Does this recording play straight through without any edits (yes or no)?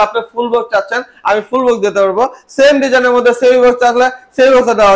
yes